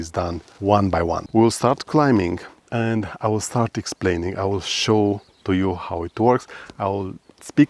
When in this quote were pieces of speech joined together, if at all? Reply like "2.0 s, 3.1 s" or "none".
1.2 s